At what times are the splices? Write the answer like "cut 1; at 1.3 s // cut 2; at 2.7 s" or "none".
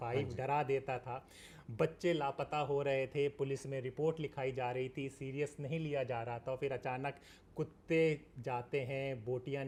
none